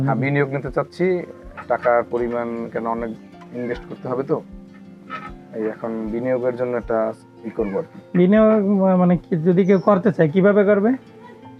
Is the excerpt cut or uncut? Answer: uncut